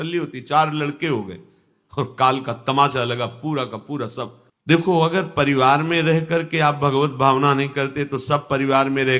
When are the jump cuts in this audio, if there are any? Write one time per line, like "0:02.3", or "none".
0:04.4